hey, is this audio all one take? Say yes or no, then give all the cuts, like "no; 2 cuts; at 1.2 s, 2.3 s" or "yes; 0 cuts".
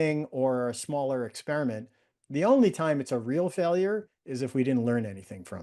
yes; 0 cuts